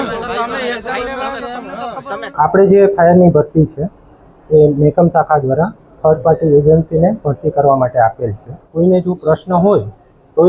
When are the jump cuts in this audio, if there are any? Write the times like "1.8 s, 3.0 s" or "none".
2.3 s, 8.6 s